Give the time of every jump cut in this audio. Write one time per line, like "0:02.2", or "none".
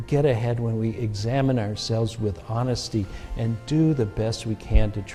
none